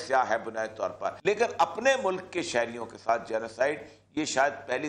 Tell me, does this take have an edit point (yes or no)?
no